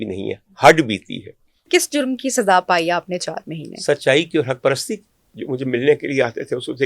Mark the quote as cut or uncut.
cut